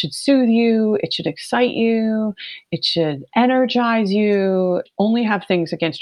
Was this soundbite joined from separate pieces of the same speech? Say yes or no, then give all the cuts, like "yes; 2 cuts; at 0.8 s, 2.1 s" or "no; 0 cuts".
yes; 1 cut; at 4.9 s